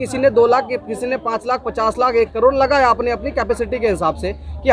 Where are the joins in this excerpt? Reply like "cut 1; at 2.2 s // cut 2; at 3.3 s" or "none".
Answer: none